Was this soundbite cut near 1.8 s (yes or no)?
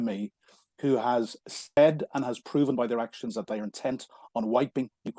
yes